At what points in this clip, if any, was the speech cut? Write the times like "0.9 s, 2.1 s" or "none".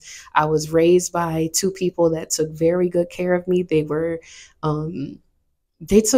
none